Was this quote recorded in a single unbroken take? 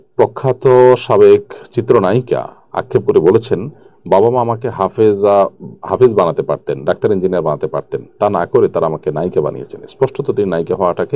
yes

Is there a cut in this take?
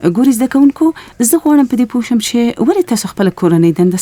no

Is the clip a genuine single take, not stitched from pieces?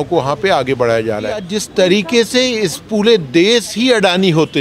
no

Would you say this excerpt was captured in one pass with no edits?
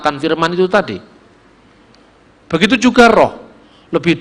yes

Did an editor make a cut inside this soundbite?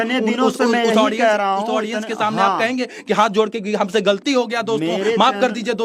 no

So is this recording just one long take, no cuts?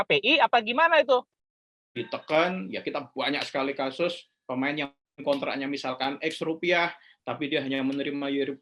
no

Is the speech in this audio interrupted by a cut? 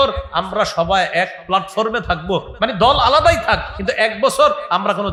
no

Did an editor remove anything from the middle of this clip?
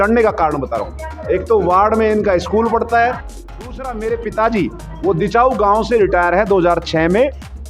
no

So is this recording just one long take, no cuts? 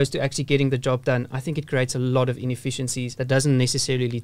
yes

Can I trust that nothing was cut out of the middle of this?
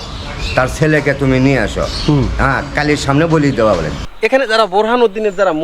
no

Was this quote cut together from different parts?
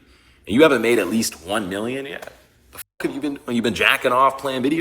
no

